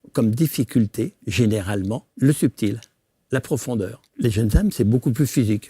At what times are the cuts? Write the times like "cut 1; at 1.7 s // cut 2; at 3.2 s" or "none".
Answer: cut 1; at 2.1 s // cut 2; at 4.0 s

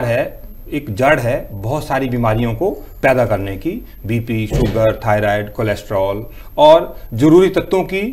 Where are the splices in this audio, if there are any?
none

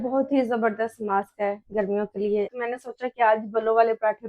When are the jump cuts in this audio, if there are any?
cut 1; at 2.5 s

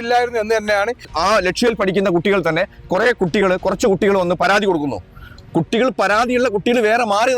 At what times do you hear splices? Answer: cut 1; at 1.1 s

